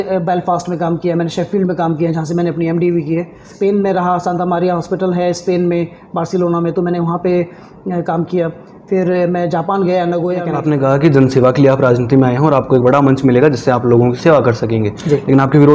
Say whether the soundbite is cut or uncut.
cut